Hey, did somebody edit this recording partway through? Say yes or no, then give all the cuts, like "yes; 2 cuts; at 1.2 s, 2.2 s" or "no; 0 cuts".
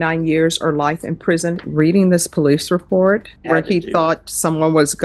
yes; 2 cuts; at 1.7 s, 3.3 s